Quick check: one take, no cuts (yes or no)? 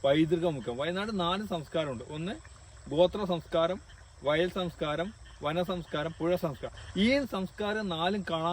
yes